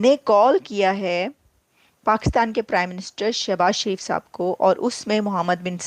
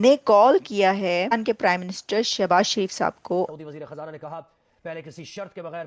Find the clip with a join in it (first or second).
second